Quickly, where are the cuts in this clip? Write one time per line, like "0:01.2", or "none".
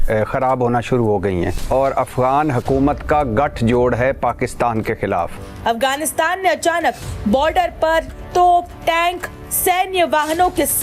0:01.6
0:05.4